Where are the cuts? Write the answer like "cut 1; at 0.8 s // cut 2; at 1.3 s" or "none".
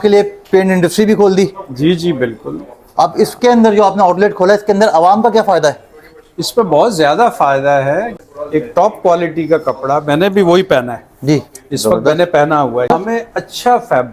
cut 1; at 8.1 s // cut 2; at 12.9 s